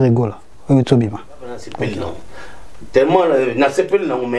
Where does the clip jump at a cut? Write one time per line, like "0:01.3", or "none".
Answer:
0:01.7